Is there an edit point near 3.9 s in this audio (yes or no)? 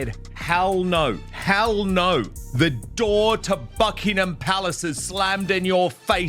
no